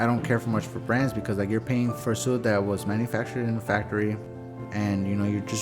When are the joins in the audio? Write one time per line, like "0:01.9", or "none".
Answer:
0:02.0
0:04.3